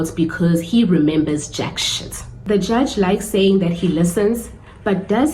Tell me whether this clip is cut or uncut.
cut